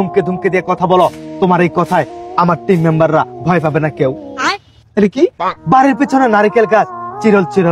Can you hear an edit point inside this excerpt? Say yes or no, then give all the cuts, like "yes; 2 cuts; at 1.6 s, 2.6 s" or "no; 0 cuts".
no; 0 cuts